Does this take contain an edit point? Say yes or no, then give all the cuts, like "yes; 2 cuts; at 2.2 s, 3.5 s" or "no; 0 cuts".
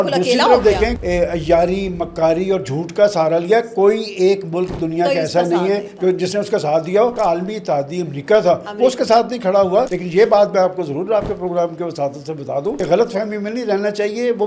yes; 4 cuts; at 1.0 s, 7.2 s, 10.0 s, 12.8 s